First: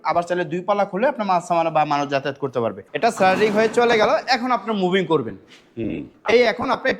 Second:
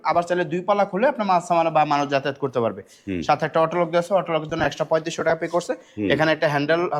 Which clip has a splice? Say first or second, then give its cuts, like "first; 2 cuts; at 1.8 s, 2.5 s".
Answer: first; 1 cut; at 2.8 s